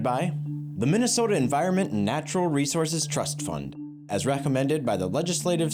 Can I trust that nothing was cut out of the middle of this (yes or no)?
yes